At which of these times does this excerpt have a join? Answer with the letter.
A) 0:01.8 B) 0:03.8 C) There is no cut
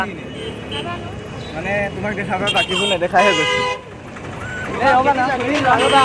C